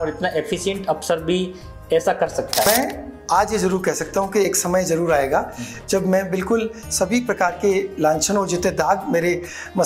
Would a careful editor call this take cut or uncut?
cut